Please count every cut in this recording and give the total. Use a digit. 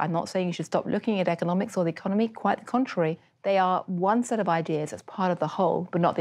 1